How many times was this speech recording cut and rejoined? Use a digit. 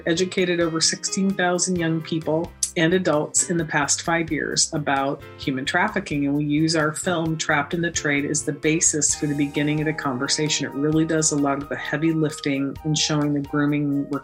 1